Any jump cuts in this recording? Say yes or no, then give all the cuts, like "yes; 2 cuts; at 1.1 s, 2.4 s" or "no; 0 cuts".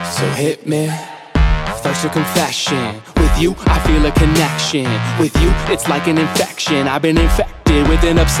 no; 0 cuts